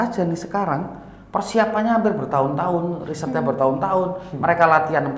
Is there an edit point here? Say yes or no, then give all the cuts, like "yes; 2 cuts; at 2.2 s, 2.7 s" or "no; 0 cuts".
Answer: no; 0 cuts